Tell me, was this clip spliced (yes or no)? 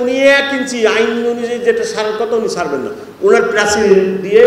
no